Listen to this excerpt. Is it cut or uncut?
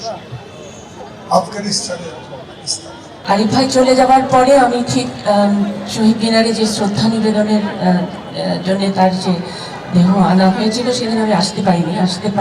cut